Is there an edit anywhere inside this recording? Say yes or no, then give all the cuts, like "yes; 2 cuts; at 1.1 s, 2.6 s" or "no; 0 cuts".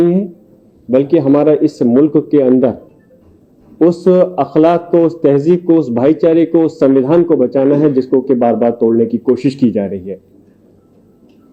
no; 0 cuts